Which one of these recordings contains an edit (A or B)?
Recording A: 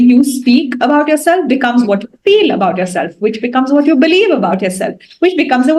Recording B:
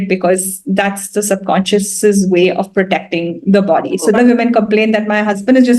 B